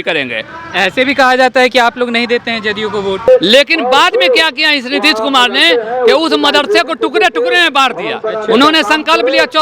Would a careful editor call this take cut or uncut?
cut